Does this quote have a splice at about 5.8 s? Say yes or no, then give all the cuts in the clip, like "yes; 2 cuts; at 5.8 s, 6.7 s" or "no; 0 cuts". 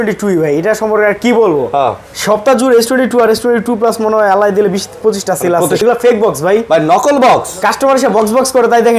yes; 1 cut; at 5.8 s